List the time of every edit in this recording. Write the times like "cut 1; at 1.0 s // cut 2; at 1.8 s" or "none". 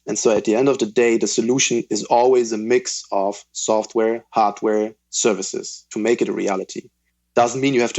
none